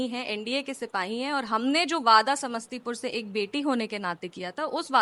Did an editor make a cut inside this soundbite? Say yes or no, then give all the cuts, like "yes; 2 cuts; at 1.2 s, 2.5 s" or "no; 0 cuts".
no; 0 cuts